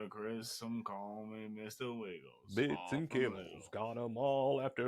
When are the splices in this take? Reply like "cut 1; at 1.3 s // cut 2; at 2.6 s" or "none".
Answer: cut 1; at 2.3 s